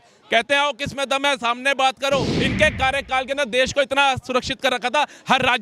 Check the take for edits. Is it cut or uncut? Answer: cut